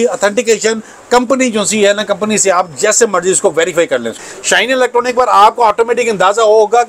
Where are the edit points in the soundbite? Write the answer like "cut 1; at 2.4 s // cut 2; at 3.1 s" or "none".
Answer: cut 1; at 4.2 s